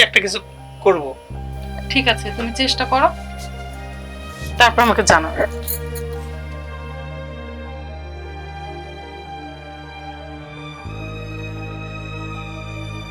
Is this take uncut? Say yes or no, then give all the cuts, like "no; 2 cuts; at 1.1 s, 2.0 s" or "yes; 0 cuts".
no; 3 cuts; at 3.1 s, 4.6 s, 5.5 s